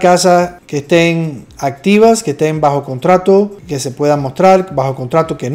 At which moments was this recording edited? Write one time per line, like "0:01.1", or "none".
none